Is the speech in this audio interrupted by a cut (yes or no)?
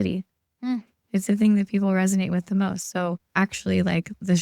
yes